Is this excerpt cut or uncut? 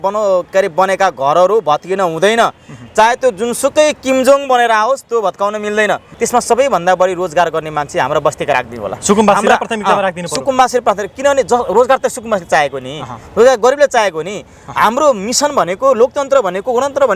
cut